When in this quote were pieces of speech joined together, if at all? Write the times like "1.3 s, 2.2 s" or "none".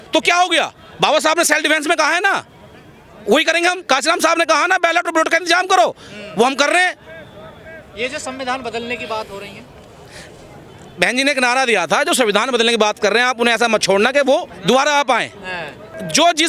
none

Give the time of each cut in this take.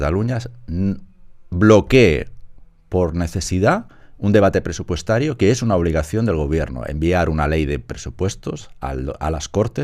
none

